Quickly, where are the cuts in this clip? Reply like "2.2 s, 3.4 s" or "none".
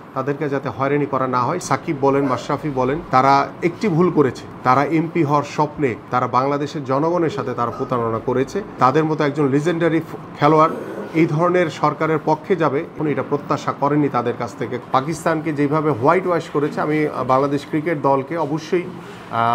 1.6 s, 3.0 s, 4.5 s, 6.0 s, 8.7 s, 13.0 s, 14.7 s